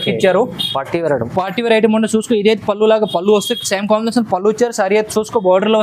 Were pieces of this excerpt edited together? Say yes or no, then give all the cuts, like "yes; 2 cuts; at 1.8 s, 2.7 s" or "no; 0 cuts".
no; 0 cuts